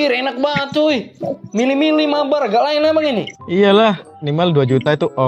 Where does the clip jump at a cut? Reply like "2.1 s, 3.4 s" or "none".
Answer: 4.2 s